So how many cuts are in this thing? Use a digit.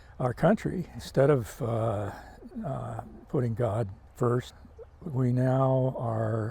3